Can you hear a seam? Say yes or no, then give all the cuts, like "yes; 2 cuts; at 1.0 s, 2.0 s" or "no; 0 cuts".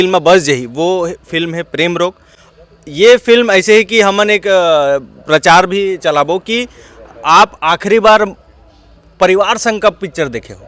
no; 0 cuts